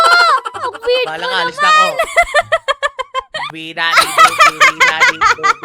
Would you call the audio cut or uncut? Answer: cut